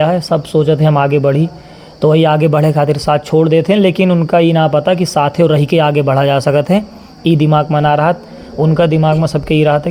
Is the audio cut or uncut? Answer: uncut